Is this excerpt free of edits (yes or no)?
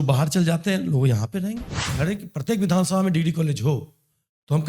no